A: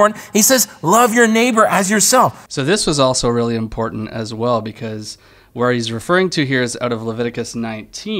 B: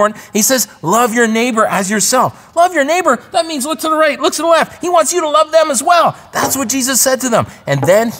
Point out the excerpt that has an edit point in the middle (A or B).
B